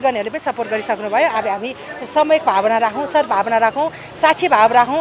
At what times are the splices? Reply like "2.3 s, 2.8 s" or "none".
none